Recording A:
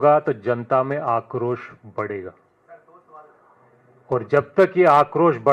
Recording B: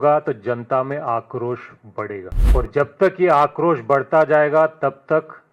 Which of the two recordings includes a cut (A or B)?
B